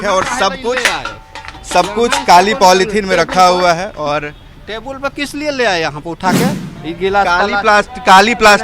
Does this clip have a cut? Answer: yes; 1 cut; at 6.7 s

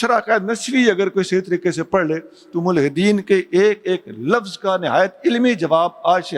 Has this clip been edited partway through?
no; 0 cuts

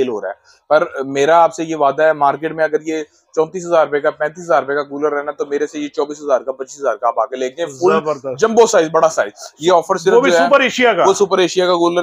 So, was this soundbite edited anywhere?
no; 0 cuts

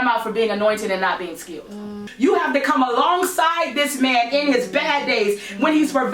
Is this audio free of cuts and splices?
no; 1 cut; at 2.1 s

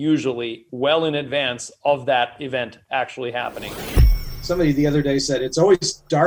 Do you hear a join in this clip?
yes; 1 cut; at 4.0 s

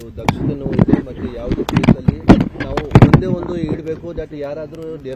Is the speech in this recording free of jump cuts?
yes; 0 cuts

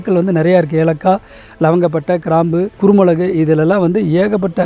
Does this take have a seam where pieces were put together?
yes; 1 cut; at 2.8 s

